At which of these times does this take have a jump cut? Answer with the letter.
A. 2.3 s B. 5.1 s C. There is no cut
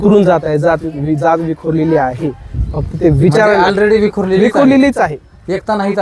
C